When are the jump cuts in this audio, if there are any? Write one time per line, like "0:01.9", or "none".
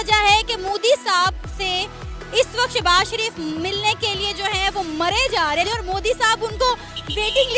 0:05.7